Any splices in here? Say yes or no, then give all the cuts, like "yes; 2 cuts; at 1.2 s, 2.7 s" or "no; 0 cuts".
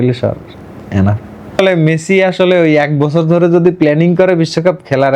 yes; 1 cut; at 1.6 s